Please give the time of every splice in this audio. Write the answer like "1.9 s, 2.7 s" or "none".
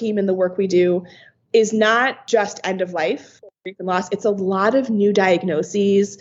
2.2 s, 3.4 s